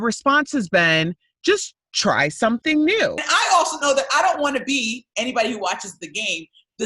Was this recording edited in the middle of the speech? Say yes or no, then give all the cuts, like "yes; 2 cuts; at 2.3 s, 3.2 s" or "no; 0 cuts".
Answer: yes; 1 cut; at 3.3 s